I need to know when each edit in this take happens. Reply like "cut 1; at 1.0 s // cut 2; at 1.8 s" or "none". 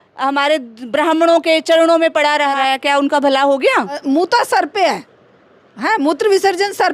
cut 1; at 2.6 s // cut 2; at 4.0 s